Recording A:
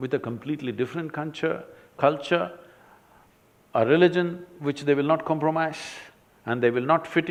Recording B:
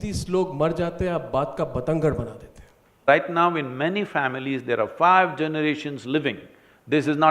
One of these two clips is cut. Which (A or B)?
B